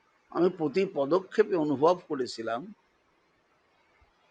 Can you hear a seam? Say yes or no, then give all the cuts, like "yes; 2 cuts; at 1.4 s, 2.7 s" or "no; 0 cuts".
no; 0 cuts